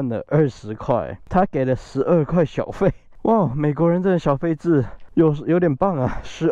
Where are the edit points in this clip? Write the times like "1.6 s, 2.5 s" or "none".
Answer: 1.2 s, 3.1 s, 5.0 s